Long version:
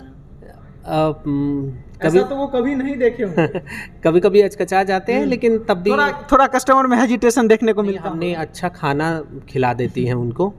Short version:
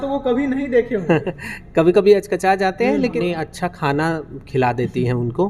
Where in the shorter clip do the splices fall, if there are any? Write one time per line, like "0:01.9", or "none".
0:03.1